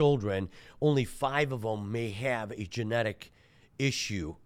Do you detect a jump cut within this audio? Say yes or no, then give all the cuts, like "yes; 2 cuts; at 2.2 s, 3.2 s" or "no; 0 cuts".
no; 0 cuts